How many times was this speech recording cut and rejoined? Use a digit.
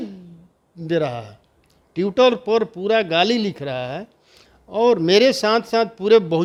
0